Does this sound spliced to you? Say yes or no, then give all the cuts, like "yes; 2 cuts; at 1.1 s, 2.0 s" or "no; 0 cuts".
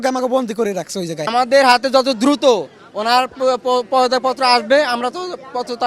yes; 1 cut; at 1.2 s